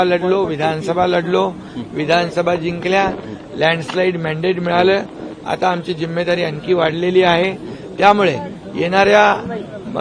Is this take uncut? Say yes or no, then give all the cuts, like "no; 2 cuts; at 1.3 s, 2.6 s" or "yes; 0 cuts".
yes; 0 cuts